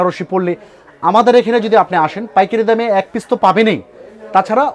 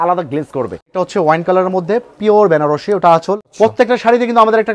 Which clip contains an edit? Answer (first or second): second